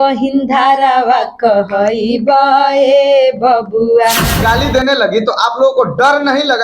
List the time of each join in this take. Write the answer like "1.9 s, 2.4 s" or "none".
4.4 s